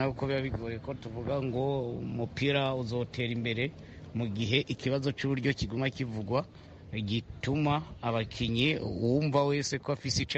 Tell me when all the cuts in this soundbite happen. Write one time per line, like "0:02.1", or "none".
none